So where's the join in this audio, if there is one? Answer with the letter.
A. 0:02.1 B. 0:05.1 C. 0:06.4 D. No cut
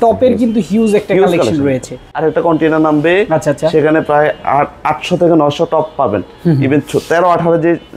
A